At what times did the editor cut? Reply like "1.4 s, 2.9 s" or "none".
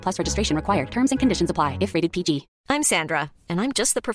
2.5 s